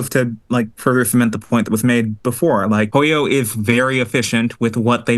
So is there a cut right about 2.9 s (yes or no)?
yes